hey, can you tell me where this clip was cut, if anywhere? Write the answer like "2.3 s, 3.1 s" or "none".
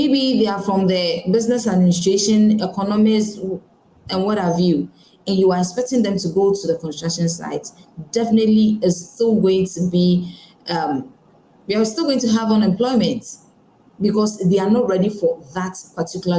none